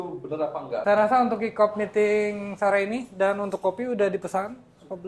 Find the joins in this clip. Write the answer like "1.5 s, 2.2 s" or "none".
none

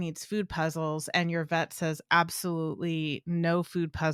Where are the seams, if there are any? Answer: none

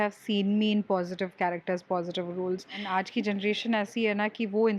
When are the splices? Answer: 2.8 s

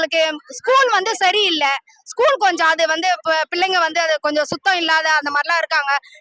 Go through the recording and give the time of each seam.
none

